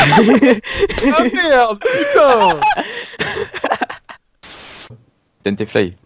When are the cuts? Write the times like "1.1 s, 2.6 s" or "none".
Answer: 4.9 s

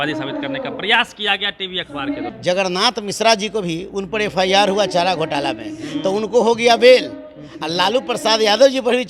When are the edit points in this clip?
2.3 s

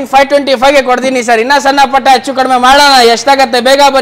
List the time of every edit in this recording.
none

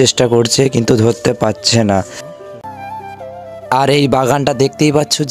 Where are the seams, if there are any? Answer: 2.6 s

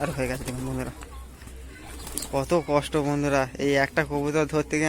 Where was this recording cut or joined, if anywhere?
2.2 s

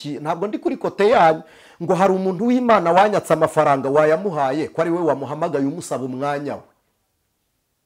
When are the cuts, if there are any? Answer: none

